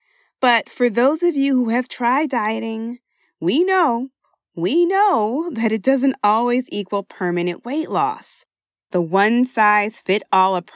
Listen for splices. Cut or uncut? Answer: cut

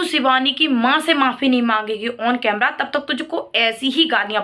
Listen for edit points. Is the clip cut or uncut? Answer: uncut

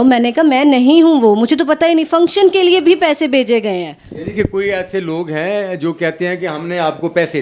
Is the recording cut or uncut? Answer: uncut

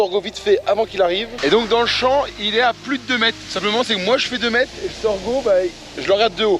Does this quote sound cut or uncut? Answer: cut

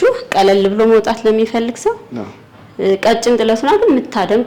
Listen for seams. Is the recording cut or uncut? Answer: uncut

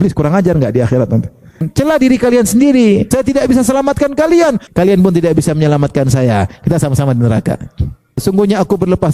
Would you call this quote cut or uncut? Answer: cut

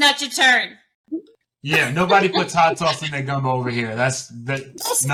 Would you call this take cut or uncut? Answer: uncut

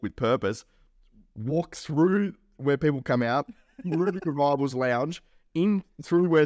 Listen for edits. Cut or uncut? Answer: uncut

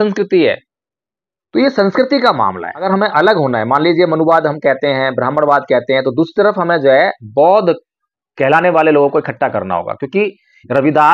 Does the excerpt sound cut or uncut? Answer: cut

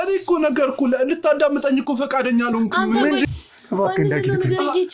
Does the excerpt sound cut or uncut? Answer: cut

